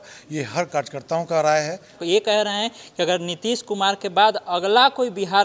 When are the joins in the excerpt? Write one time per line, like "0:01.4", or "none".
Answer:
0:02.0